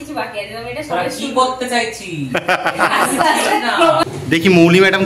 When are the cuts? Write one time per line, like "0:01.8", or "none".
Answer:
0:04.0